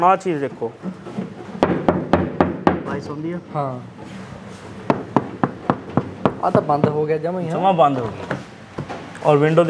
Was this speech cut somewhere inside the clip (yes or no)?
no